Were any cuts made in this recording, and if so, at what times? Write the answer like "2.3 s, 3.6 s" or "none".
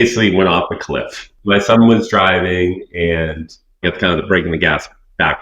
3.8 s